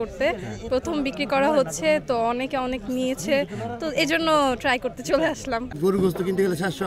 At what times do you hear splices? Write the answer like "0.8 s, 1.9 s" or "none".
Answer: 5.7 s